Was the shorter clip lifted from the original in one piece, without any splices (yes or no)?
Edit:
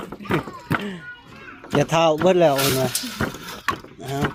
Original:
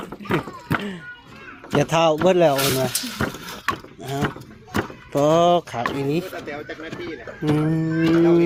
yes